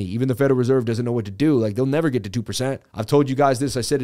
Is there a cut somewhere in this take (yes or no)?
yes